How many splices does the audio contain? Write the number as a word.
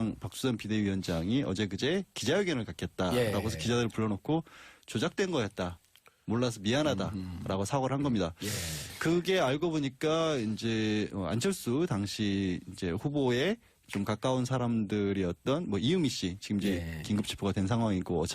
one